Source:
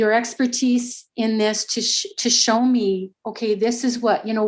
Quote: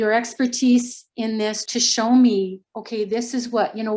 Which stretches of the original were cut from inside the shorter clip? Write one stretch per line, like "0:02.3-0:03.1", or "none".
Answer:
0:01.6-0:02.1